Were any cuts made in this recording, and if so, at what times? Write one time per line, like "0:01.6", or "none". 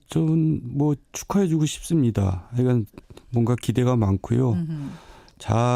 0:01.2